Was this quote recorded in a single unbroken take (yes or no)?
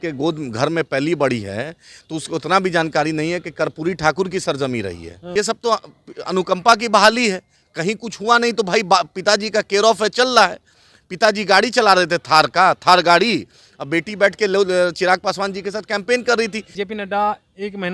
no